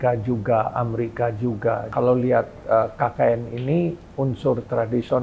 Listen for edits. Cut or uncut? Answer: cut